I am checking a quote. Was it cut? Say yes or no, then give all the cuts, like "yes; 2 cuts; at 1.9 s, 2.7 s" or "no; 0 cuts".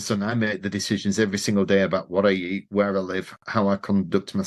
no; 0 cuts